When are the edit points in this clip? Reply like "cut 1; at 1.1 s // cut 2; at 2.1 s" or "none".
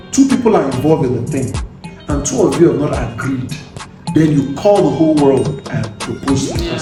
none